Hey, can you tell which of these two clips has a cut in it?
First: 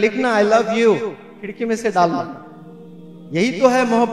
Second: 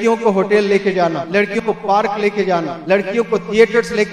second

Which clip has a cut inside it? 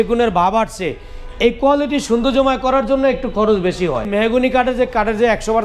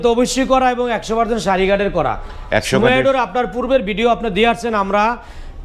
first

